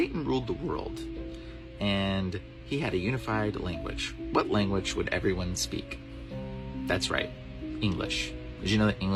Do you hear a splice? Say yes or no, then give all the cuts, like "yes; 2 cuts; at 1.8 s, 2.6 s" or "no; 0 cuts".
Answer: no; 0 cuts